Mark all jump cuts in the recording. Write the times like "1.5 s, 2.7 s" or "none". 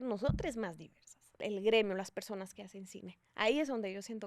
1.4 s